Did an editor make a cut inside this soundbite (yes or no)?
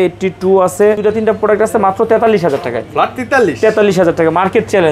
yes